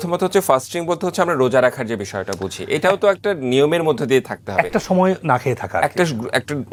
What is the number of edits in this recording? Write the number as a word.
zero